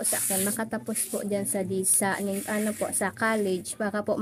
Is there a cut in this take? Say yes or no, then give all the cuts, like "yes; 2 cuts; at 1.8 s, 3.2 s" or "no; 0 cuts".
no; 0 cuts